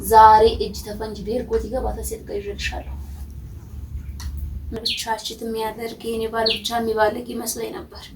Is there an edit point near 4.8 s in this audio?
yes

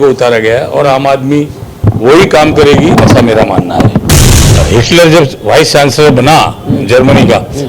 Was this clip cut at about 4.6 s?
yes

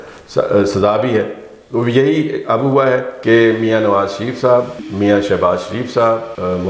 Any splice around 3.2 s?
yes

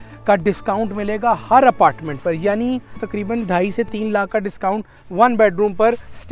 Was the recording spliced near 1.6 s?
no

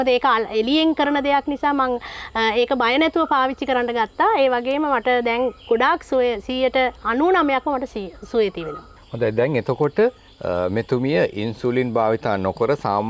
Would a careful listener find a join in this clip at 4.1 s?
no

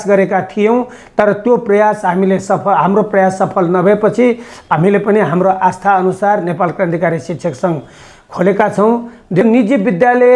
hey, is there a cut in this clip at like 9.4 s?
yes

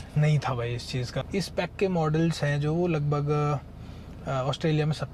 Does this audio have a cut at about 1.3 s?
yes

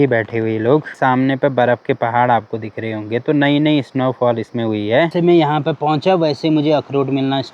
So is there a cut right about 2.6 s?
no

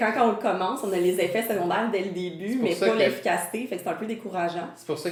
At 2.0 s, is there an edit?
no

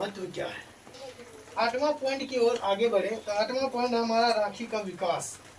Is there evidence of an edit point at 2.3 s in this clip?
no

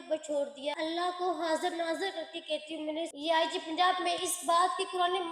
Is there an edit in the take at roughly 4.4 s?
no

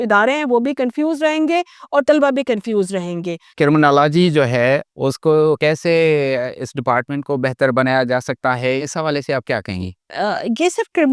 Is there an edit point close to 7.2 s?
no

